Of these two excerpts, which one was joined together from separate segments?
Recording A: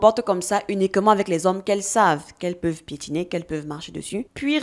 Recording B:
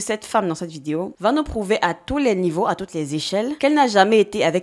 B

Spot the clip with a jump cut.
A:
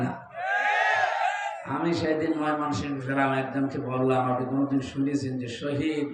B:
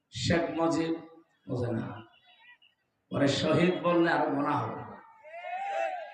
A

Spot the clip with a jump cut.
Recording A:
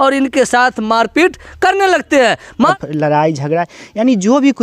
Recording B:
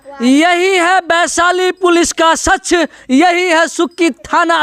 A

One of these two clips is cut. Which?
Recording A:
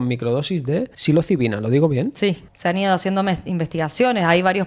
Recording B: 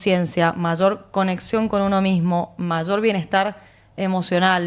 A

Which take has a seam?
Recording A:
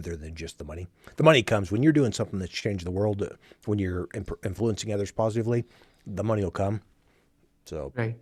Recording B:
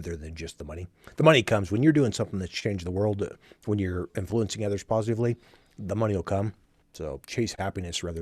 B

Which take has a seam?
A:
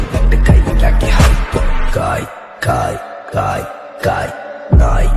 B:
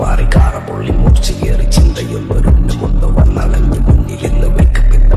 A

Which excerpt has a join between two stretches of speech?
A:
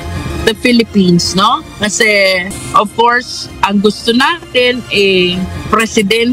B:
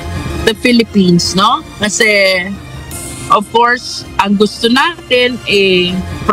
A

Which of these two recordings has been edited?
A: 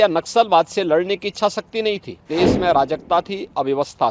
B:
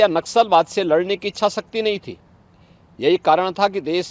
A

